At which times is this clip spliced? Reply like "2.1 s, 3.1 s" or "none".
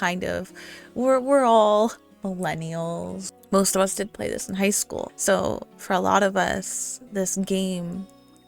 3.3 s, 5.1 s